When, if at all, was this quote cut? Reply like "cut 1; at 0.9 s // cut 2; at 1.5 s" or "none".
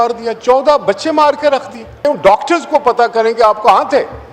cut 1; at 2.0 s